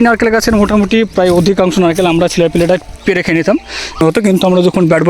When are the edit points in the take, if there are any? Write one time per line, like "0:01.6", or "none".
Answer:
0:04.0

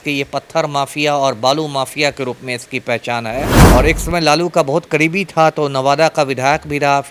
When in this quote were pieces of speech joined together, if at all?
0:03.6

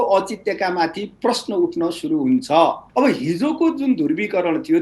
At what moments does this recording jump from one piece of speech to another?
0:02.8

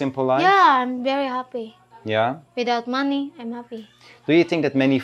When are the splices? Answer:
none

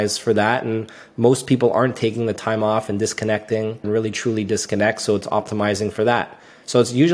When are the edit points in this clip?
0:03.9

